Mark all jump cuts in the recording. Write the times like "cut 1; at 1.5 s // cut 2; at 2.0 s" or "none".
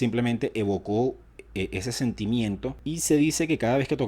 cut 1; at 2.8 s